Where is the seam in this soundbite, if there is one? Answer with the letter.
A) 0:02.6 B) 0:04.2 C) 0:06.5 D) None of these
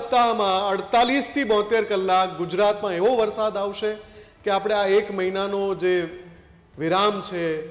D